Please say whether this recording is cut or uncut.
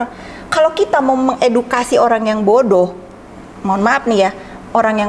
uncut